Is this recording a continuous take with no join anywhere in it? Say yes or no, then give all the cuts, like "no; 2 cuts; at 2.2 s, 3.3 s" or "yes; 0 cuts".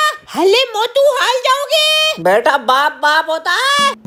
yes; 0 cuts